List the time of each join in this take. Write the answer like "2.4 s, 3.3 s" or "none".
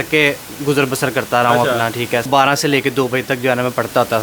2.3 s